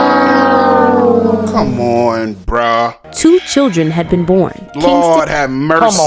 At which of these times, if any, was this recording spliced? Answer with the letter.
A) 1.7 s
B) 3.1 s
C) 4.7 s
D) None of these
B